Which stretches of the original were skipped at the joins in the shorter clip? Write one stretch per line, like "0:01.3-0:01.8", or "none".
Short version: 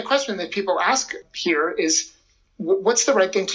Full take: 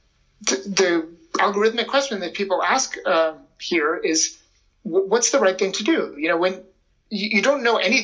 0:03.0-0:03.4